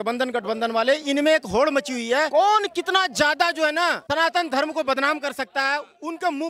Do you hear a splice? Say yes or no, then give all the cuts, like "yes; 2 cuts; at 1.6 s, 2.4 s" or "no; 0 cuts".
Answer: no; 0 cuts